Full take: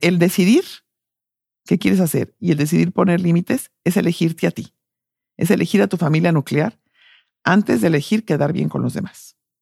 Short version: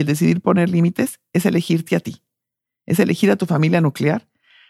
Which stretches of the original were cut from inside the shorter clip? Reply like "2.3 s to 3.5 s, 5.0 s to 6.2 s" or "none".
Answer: none